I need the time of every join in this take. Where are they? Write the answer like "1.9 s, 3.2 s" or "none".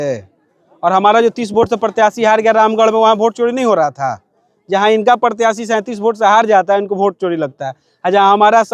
none